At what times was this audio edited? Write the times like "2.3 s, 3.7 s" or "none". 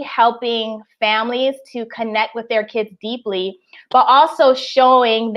none